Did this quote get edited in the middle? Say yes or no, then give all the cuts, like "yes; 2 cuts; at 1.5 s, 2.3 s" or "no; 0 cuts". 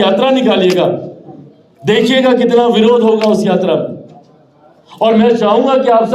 no; 0 cuts